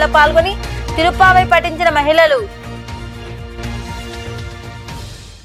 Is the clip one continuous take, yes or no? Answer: yes